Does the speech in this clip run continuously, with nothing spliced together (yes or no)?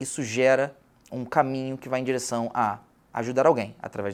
yes